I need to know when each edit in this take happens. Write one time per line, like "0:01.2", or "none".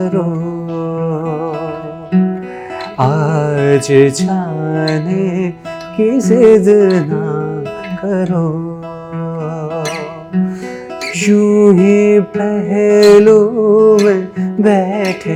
none